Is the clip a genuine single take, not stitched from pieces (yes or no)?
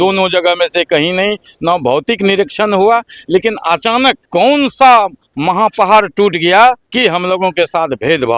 no